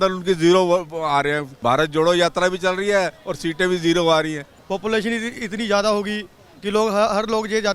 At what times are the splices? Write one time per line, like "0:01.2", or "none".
0:01.5
0:04.5